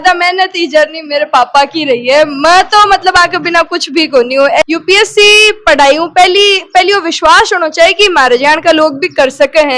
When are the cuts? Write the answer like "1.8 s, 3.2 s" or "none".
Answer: 4.6 s